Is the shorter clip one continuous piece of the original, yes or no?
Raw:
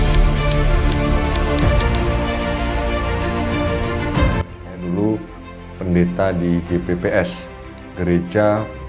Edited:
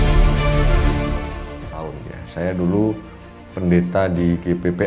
no